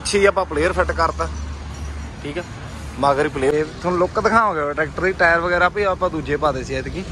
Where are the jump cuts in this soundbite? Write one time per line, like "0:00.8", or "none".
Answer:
0:03.5

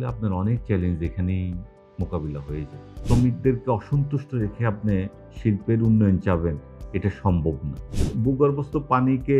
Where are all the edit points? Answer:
0:02.9
0:07.8

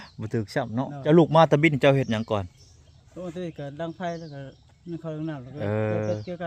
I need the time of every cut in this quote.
0:01.1

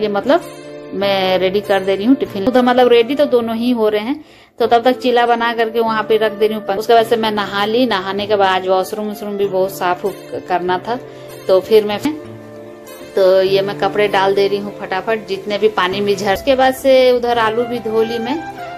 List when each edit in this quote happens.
0:02.5
0:06.7
0:12.0
0:16.4

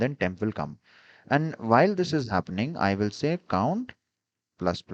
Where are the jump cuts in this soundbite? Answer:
none

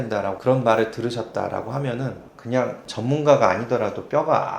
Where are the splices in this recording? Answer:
0:02.2

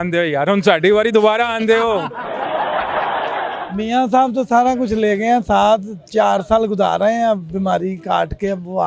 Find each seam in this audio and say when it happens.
0:03.6

